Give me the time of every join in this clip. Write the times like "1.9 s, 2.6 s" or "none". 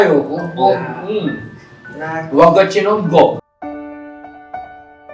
3.4 s